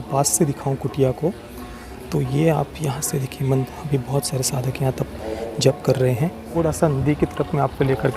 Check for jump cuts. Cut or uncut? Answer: cut